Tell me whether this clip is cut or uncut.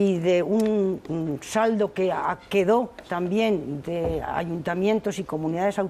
cut